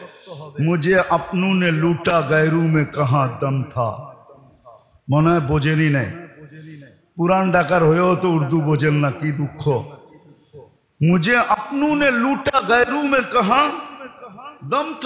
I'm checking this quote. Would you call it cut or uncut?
uncut